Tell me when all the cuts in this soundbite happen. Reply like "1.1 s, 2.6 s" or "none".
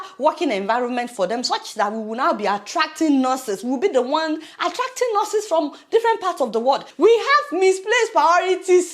6.9 s